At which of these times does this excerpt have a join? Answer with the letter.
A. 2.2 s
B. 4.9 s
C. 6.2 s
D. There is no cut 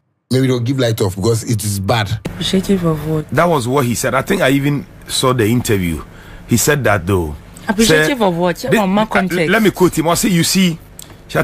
A